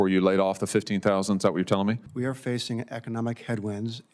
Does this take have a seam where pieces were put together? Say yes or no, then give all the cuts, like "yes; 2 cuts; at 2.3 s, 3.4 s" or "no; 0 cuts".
yes; 1 cut; at 2.1 s